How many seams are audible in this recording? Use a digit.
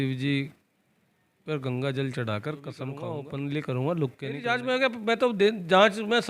2